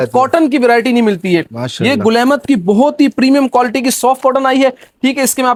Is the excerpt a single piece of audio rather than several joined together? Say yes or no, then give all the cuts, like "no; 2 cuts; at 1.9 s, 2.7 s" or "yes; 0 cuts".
yes; 0 cuts